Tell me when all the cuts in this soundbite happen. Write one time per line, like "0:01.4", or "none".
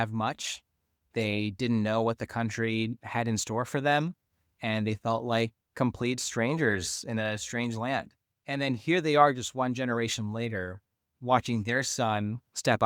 none